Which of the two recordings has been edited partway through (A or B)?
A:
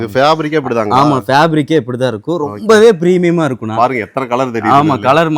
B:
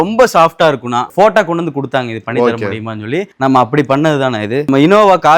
B